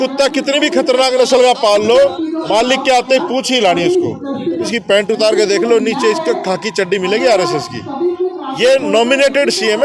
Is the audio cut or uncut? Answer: cut